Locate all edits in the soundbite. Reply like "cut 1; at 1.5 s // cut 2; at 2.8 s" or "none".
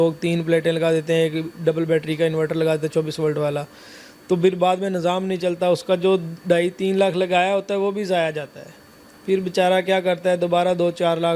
none